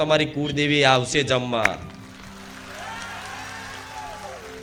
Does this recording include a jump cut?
no; 0 cuts

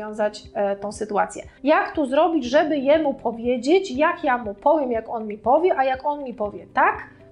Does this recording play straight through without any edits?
no; 1 cut; at 1.5 s

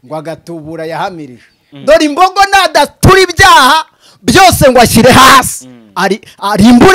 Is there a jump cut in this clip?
yes; 1 cut; at 1.6 s

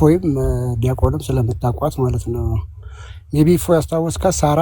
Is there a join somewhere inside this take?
no; 0 cuts

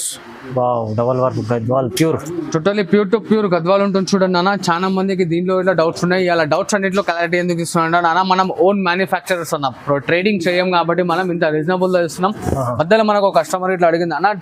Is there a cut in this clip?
no; 0 cuts

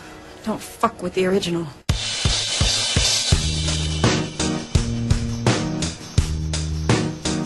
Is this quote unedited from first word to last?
yes; 0 cuts

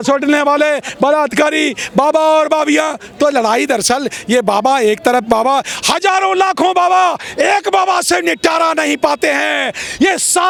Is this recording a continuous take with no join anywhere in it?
yes; 0 cuts

